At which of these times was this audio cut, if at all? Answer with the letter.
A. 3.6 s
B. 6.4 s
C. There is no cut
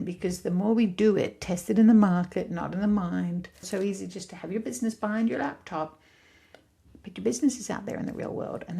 A